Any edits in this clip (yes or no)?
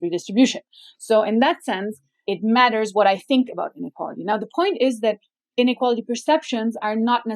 no